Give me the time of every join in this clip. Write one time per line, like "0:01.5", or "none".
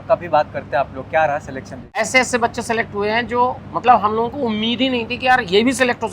0:02.1